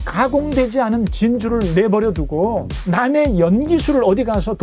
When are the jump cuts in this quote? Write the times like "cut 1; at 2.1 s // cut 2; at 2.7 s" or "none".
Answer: cut 1; at 2.7 s